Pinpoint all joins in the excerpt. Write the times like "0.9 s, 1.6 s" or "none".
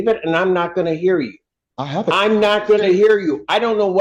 none